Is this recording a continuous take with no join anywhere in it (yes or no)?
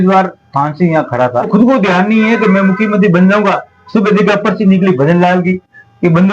no